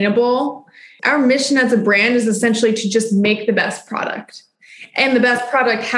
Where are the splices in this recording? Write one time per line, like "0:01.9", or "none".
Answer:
0:00.9